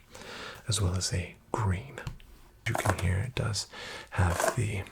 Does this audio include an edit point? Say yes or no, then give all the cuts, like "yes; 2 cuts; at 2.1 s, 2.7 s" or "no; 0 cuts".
yes; 1 cut; at 2.6 s